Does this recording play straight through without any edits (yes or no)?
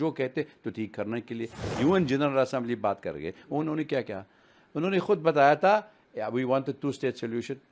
no